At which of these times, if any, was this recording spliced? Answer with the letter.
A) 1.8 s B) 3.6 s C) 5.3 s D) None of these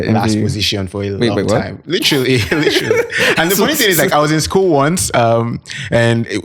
D